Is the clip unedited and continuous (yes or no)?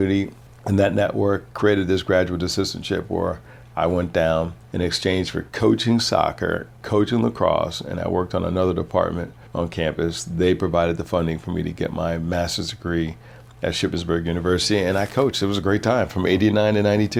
yes